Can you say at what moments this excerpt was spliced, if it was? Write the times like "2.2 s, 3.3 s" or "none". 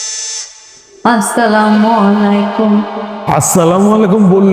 3.2 s